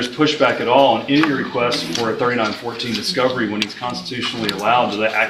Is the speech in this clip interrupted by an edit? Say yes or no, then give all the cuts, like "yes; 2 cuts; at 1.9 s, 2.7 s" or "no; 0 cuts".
no; 0 cuts